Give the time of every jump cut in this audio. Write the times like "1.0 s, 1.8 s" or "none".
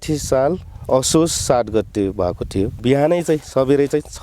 2.8 s